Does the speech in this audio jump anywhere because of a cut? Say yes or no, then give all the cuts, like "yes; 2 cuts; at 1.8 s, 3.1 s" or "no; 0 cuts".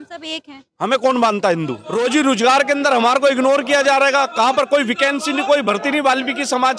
yes; 1 cut; at 1.8 s